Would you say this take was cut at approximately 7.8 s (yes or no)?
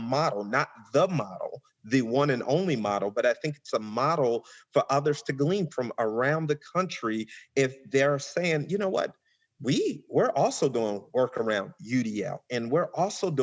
no